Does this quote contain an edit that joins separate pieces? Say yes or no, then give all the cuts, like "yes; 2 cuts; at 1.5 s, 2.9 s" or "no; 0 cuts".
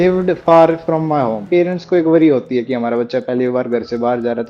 yes; 1 cut; at 1.4 s